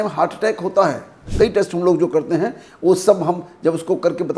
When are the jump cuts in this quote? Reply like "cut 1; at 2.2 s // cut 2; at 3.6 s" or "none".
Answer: cut 1; at 1.2 s